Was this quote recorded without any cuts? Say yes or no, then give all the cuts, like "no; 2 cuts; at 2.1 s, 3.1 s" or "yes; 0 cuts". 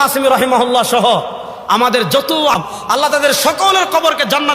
no; 1 cut; at 2.6 s